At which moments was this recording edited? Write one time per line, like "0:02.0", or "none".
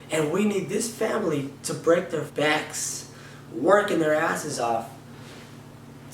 0:02.3